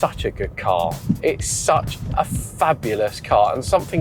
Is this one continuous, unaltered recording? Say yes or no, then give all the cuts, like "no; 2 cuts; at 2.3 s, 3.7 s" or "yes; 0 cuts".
yes; 0 cuts